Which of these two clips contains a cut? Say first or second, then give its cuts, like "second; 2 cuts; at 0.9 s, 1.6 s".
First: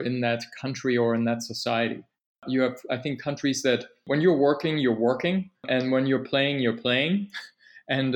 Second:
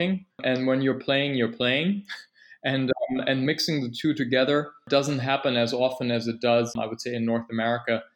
first; 1 cut; at 2.4 s